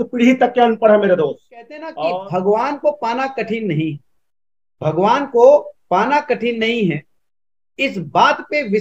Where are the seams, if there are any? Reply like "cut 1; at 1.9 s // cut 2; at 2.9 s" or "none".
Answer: cut 1; at 1.8 s

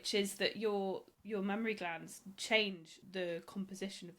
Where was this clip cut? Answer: cut 1; at 1.1 s // cut 2; at 2.9 s

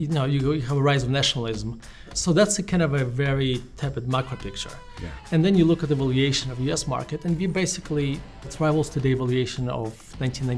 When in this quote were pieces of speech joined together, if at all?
cut 1; at 2.1 s // cut 2; at 8.5 s

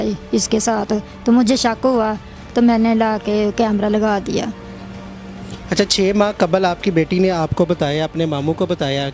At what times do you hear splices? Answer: none

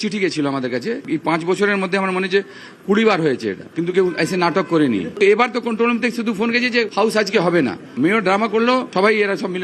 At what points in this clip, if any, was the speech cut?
cut 1; at 1.1 s // cut 2; at 6.9 s // cut 3; at 8.9 s

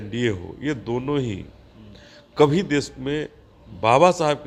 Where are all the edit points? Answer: none

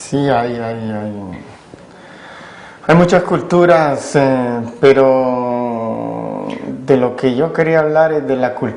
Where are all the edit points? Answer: cut 1; at 6.3 s

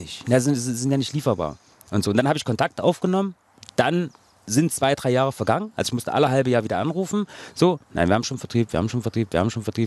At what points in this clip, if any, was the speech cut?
none

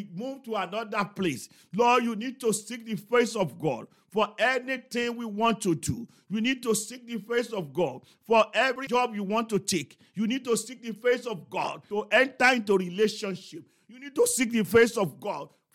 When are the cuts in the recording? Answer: cut 1; at 8.8 s // cut 2; at 11.8 s

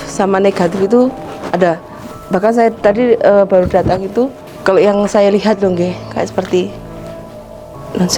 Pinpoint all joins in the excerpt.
cut 1; at 4.5 s

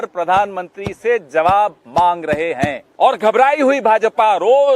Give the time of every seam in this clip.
cut 1; at 2.8 s

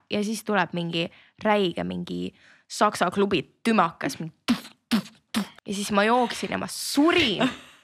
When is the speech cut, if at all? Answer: cut 1; at 5.5 s

